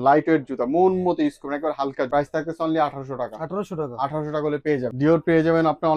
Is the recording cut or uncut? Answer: uncut